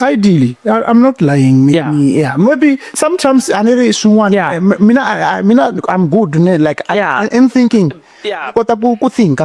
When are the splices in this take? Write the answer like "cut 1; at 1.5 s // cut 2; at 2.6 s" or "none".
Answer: none